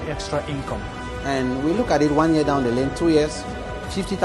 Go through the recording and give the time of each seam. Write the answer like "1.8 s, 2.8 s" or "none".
none